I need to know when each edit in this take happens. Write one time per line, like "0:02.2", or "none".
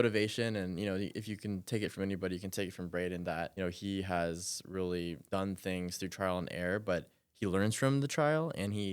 0:03.5
0:05.2

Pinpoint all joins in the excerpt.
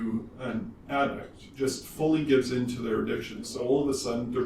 0:01.5
0:03.5

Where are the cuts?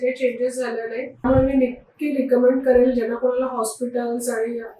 0:01.2

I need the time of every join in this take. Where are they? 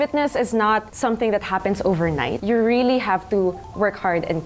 0:00.9
0:02.4

